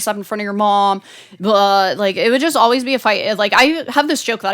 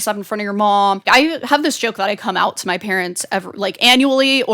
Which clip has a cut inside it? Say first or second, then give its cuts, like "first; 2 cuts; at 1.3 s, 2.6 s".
second; 1 cut; at 1.1 s